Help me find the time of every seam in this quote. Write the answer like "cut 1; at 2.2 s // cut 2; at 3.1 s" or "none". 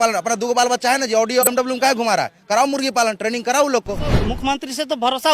cut 1; at 1.5 s // cut 2; at 4.1 s

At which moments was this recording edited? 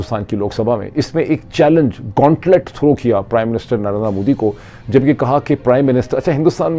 none

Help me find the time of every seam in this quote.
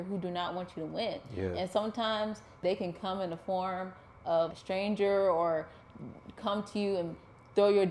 cut 1; at 2.6 s // cut 2; at 4.5 s

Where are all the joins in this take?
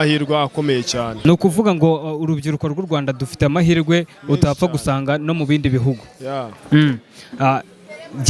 none

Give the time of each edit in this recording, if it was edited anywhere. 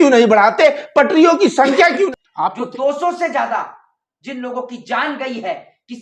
cut 1; at 2.1 s

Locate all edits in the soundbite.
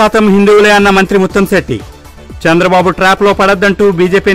none

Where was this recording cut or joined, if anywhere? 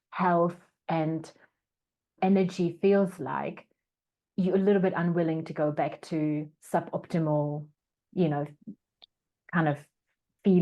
cut 1; at 2.2 s

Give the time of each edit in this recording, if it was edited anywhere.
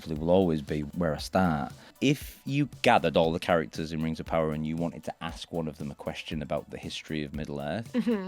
cut 1; at 0.9 s // cut 2; at 1.9 s

